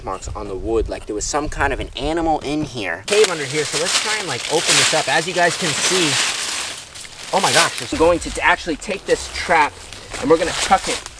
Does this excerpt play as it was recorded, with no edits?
no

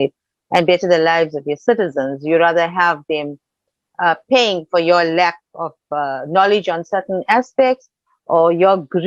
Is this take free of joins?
yes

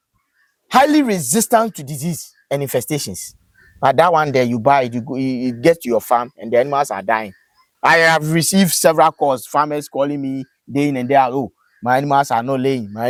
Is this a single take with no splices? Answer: yes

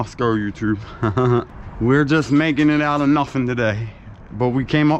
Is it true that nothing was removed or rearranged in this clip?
no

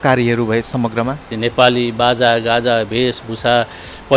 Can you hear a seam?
yes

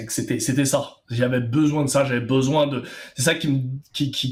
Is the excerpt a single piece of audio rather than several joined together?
yes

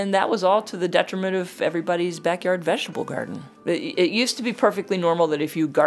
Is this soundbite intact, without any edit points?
no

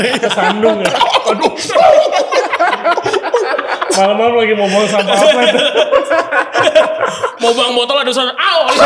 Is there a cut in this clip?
no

